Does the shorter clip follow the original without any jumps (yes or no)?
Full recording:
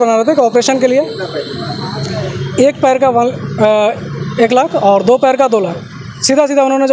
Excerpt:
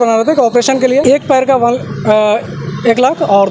no